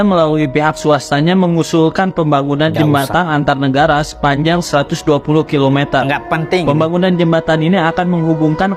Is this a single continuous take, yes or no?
yes